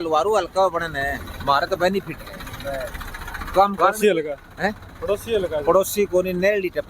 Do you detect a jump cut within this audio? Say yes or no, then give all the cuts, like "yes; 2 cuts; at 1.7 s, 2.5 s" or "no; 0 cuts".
yes; 1 cut; at 3.7 s